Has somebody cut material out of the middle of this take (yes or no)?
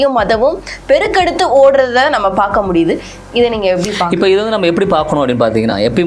no